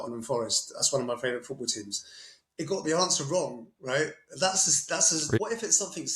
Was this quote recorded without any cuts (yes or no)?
no